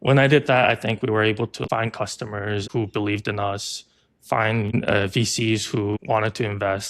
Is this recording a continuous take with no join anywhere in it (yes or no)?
no